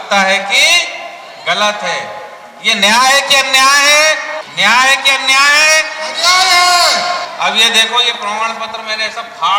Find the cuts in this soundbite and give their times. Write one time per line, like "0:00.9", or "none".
0:04.4
0:07.3